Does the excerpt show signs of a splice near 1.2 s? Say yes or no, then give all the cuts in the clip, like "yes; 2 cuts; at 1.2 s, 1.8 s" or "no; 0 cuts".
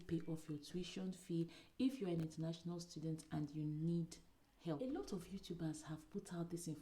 no; 1 cut; at 4.8 s